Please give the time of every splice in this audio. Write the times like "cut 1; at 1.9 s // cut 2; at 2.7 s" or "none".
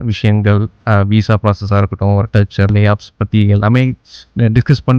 cut 1; at 2.7 s